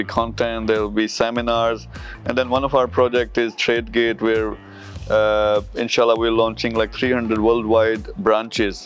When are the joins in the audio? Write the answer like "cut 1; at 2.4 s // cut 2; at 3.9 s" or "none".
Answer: none